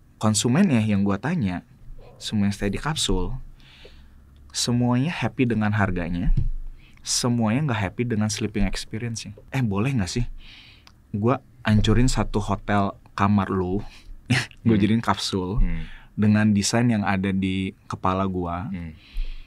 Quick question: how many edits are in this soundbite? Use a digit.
1